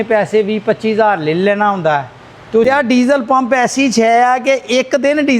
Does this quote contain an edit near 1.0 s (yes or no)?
no